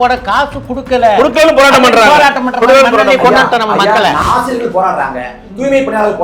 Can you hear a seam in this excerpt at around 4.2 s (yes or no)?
yes